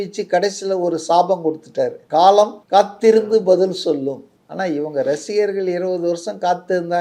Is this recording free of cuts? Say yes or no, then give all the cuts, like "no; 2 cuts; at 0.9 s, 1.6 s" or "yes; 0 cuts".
no; 2 cuts; at 2.0 s, 2.6 s